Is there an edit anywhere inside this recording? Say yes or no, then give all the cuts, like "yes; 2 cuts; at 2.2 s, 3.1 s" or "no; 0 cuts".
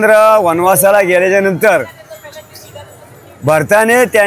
no; 0 cuts